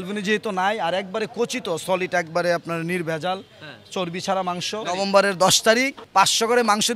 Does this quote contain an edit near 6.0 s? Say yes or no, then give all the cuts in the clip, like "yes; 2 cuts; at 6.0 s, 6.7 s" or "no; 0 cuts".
yes; 2 cuts; at 4.9 s, 6.0 s